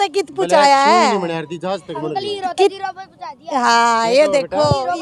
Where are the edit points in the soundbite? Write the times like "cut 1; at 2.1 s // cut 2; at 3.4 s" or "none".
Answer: none